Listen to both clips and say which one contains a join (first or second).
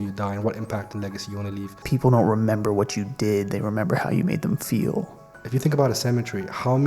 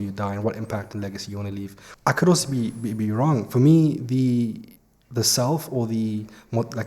first